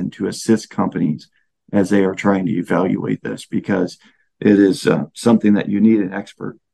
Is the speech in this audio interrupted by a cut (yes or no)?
no